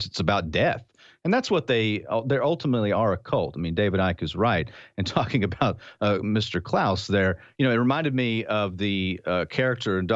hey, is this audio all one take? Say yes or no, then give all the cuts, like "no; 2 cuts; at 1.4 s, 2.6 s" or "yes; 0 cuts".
yes; 0 cuts